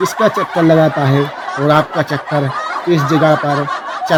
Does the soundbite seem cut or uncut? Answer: uncut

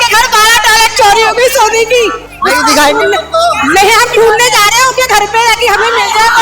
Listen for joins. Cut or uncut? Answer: uncut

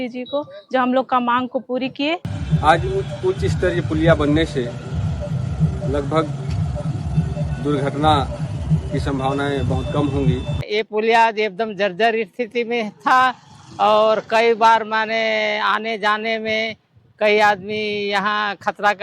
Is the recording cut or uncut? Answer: cut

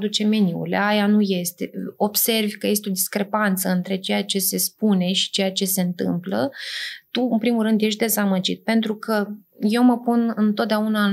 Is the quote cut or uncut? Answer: uncut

